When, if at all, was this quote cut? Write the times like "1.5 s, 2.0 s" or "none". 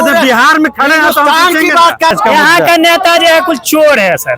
2.1 s